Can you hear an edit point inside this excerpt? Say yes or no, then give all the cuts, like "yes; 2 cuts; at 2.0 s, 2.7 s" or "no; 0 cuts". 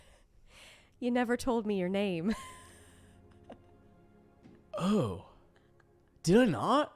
no; 0 cuts